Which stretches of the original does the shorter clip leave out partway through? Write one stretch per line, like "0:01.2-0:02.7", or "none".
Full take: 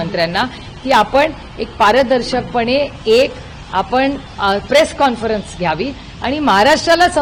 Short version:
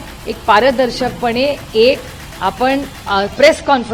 none